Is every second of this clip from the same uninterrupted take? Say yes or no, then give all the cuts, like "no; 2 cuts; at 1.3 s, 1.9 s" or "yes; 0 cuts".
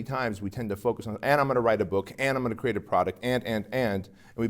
yes; 0 cuts